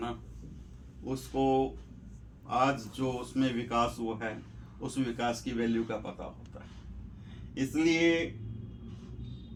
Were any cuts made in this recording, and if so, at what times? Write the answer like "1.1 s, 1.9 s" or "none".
none